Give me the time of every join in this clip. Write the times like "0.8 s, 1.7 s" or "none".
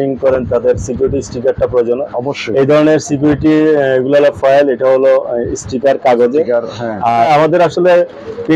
7.2 s